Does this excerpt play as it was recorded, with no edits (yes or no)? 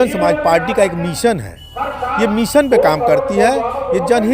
yes